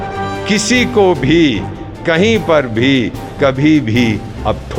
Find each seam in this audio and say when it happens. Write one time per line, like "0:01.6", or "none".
none